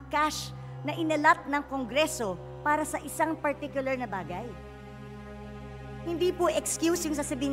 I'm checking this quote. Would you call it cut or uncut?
cut